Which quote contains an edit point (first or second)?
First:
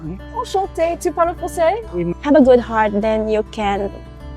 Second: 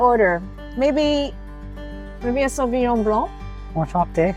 first